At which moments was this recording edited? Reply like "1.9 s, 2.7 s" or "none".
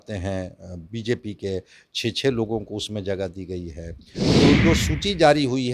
4.4 s